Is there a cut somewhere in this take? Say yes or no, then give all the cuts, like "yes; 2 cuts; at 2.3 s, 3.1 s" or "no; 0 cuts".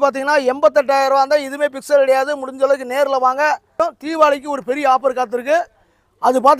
yes; 1 cut; at 3.8 s